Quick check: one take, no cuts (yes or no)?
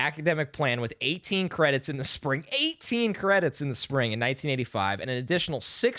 yes